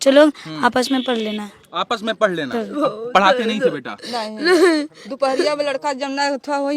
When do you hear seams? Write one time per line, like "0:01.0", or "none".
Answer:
0:02.7